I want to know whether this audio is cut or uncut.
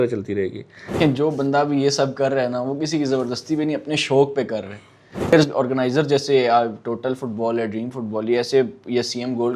cut